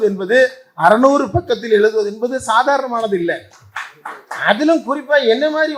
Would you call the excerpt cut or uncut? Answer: uncut